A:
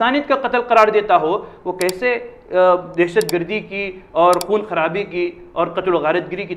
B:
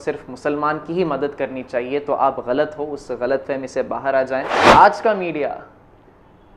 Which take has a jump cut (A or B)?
B